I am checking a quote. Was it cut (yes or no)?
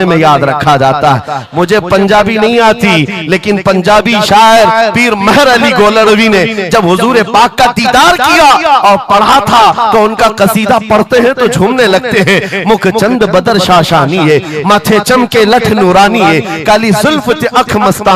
no